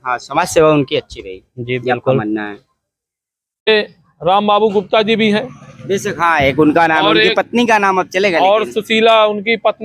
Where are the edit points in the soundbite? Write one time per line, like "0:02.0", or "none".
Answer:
0:03.7